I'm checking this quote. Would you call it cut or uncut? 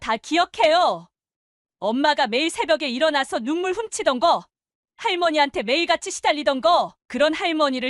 uncut